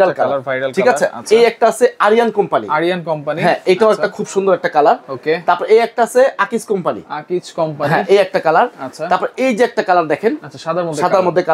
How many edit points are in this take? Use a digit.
0